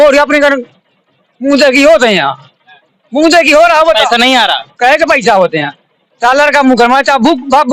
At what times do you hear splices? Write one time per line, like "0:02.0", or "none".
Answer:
none